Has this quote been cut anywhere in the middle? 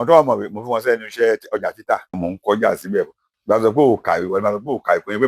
yes; 2 cuts; at 2.2 s, 3.3 s

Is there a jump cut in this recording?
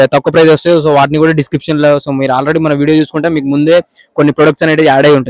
no; 0 cuts

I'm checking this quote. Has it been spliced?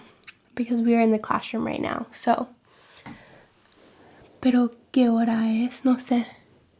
no; 0 cuts

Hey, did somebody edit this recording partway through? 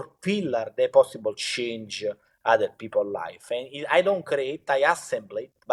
no; 0 cuts

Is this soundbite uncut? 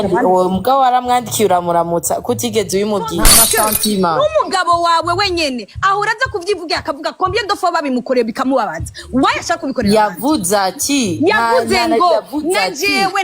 no; 1 cut; at 3.3 s

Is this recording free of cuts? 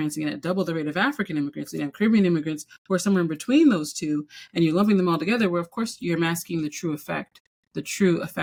yes; 0 cuts

